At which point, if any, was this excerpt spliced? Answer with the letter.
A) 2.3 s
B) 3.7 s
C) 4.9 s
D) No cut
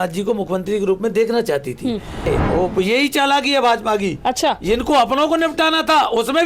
A